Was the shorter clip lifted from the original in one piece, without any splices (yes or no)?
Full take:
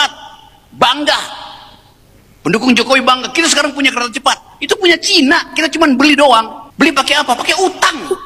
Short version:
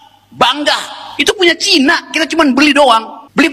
no